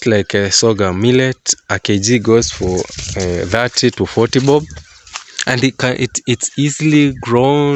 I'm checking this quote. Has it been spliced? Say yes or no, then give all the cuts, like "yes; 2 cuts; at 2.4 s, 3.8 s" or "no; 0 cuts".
no; 0 cuts